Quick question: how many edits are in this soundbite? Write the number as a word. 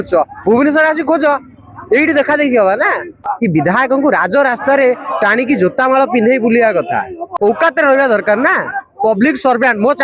two